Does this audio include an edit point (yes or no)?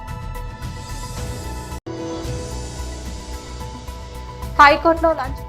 yes